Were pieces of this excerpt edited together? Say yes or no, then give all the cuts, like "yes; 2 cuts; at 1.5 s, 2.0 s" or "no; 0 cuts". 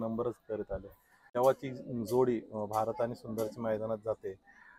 yes; 1 cut; at 1.3 s